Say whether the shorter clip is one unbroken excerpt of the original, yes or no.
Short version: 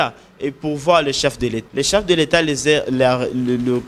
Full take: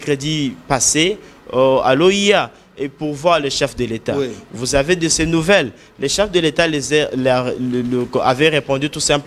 no